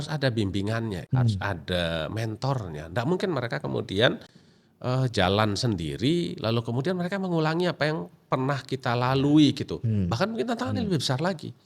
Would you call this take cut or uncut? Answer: cut